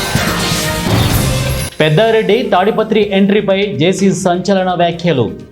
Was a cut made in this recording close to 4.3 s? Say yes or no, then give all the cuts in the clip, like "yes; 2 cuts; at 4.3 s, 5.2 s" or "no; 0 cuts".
no; 1 cut; at 1.6 s